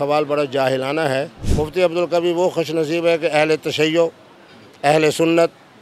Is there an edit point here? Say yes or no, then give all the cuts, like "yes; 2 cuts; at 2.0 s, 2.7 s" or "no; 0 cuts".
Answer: yes; 1 cut; at 1.4 s